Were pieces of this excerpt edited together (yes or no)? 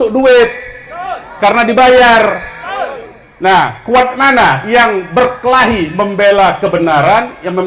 no